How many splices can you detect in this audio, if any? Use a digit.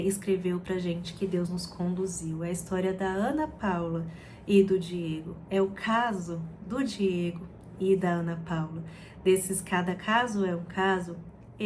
0